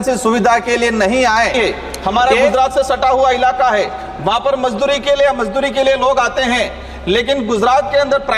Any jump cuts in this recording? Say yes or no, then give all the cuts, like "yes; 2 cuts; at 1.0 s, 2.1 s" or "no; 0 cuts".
yes; 1 cut; at 1.5 s